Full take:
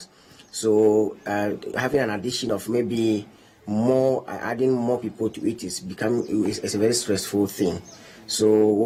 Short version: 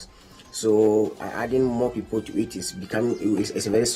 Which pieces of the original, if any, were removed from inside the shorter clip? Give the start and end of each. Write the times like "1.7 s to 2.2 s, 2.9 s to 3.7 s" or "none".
1.2 s to 4.3 s